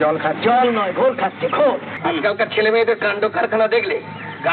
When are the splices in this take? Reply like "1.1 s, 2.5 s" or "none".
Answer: 1.9 s